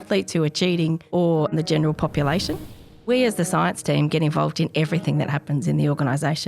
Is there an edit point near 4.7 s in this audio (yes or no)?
no